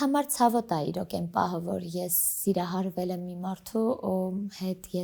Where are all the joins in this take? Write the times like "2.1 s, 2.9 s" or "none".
none